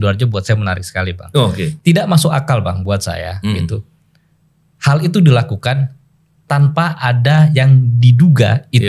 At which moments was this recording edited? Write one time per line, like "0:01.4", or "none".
0:01.8